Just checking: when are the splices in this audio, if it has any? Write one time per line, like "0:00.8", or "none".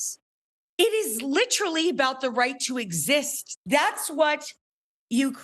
0:03.4